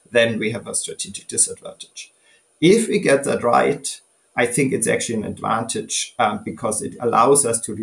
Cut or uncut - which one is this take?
uncut